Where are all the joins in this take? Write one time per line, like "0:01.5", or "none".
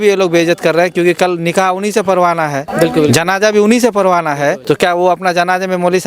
0:02.6
0:04.6